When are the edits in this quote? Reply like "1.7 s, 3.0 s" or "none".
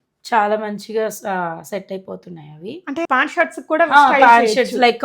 3.1 s